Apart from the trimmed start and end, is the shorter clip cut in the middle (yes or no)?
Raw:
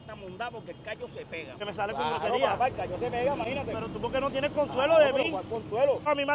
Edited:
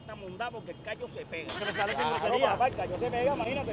no